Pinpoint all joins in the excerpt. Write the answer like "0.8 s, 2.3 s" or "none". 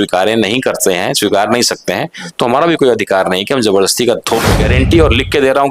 4.6 s